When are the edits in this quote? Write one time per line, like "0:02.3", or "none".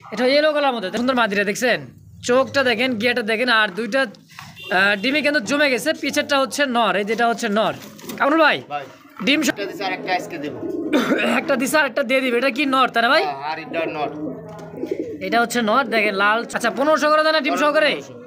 0:00.9
0:09.5
0:16.5

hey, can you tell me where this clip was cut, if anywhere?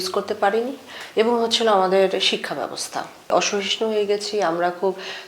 0:03.3

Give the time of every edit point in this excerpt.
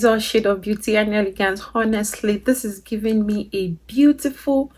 none

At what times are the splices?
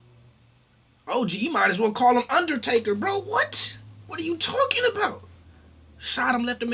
none

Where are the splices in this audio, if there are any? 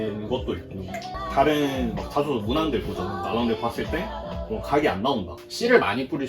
0:01.0
0:05.4

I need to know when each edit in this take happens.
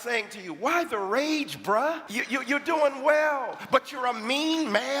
0:02.1

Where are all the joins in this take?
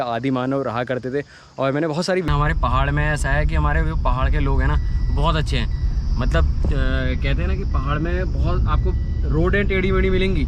0:02.3

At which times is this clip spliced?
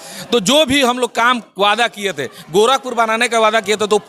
none

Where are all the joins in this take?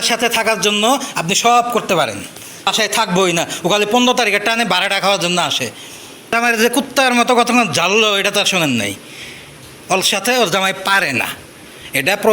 0:02.7
0:06.3

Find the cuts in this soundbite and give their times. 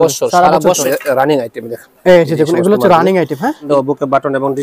0:00.8
0:03.7

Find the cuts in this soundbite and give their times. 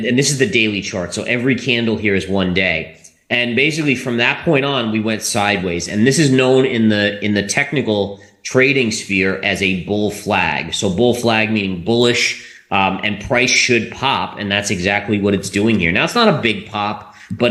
none

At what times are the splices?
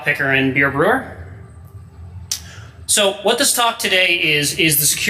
0:01.8

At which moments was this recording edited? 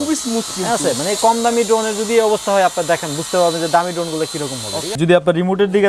0:04.9

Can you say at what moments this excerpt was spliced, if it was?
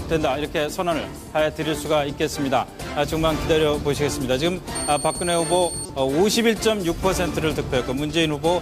0:02.8

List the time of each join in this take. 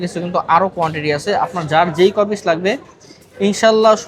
none

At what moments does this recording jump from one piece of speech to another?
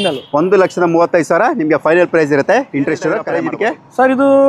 0:03.4

